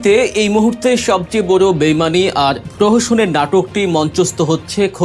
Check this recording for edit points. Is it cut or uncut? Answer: uncut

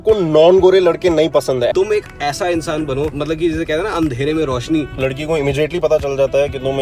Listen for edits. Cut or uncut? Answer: cut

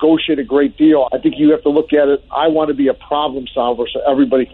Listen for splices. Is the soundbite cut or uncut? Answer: cut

